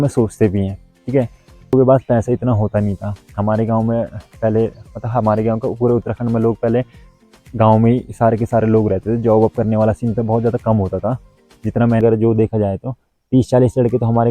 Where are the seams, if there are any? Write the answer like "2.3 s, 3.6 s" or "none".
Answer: 1.7 s, 12.0 s

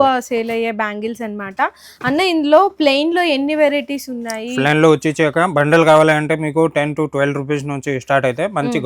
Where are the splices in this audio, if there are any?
none

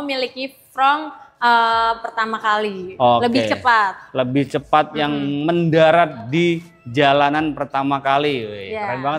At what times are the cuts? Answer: none

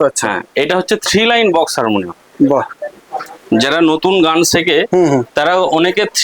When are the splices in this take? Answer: none

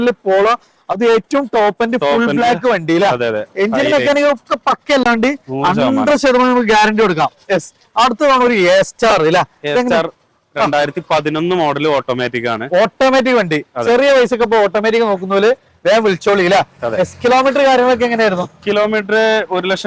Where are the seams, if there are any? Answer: none

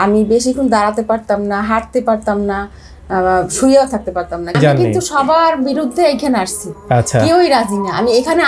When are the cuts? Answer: 4.6 s

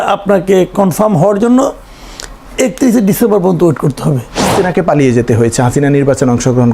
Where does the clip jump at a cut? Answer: 4.5 s

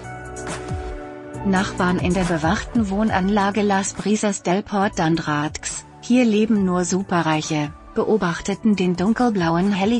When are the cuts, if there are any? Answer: 1.4 s

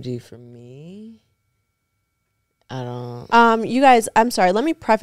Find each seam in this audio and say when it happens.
none

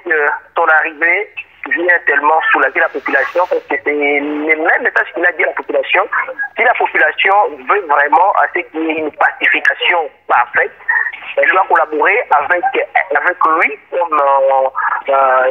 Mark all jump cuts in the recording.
none

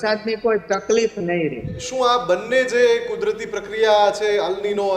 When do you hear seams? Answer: 1.8 s

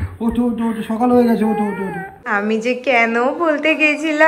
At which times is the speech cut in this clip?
2.3 s

